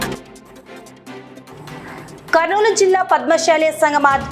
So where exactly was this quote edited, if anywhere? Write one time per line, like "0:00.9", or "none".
0:01.4